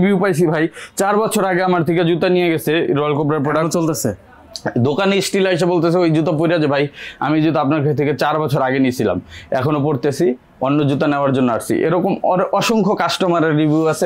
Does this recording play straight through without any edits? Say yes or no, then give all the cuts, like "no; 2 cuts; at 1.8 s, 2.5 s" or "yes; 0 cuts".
yes; 0 cuts